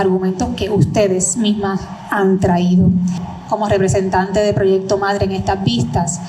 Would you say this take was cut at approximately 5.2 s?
no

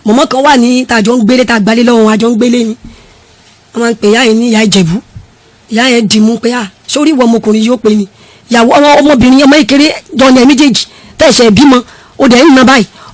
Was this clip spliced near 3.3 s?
no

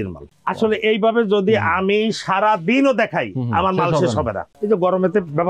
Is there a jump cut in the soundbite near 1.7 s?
no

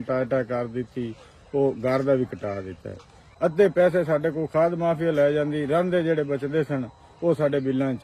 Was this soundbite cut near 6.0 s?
no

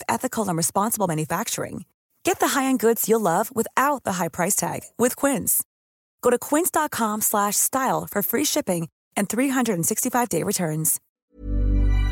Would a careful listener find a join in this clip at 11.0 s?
yes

